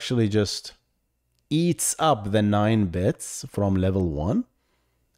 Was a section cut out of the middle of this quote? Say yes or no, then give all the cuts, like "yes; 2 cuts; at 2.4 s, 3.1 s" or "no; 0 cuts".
no; 0 cuts